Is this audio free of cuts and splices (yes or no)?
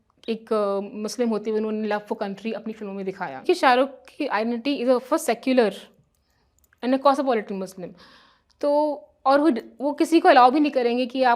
no